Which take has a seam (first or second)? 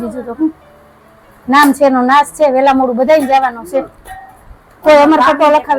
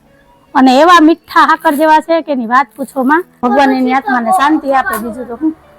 second